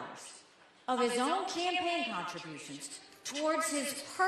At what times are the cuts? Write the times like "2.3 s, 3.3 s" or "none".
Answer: none